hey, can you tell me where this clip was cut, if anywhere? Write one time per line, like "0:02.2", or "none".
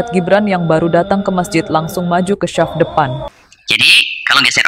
0:03.3